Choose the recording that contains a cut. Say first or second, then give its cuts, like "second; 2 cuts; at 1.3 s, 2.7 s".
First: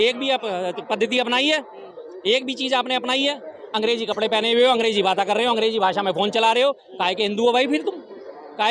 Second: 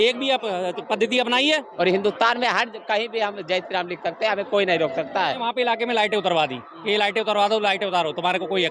second; 2 cuts; at 1.7 s, 5.4 s